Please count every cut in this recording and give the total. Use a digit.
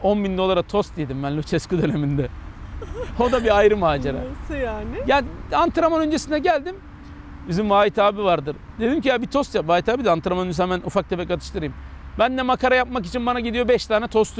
0